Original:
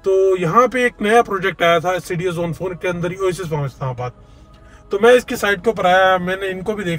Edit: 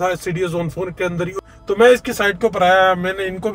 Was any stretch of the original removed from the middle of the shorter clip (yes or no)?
yes